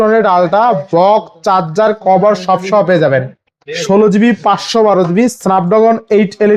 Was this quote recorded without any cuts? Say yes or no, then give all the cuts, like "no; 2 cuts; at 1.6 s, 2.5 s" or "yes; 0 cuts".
yes; 0 cuts